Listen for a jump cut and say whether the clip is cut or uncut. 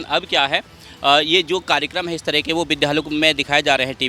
uncut